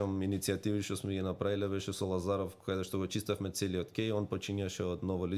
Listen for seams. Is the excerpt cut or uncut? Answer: uncut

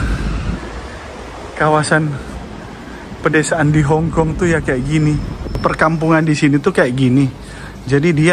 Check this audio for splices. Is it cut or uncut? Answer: cut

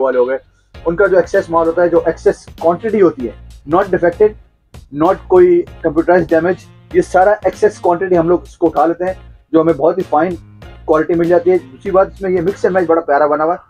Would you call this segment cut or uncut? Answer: uncut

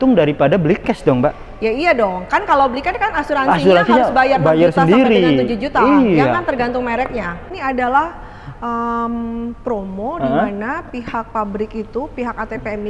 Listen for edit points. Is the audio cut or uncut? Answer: cut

